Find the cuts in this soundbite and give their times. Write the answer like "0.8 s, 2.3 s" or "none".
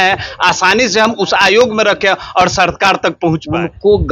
3.2 s